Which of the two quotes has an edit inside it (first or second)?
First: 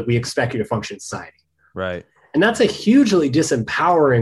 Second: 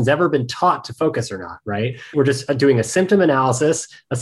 second